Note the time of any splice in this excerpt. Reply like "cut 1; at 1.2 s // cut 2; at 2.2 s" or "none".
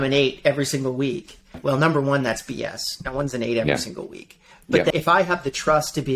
cut 1; at 1.6 s // cut 2; at 4.9 s